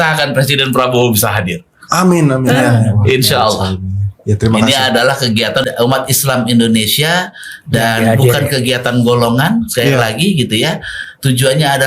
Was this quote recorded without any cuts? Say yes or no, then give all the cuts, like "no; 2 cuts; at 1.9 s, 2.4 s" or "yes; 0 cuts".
no; 1 cut; at 5.6 s